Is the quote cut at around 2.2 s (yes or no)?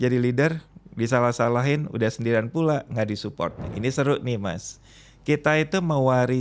no